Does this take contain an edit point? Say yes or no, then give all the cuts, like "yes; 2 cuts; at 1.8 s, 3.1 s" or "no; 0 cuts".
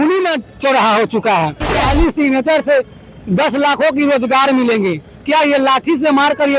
yes; 1 cut; at 1.9 s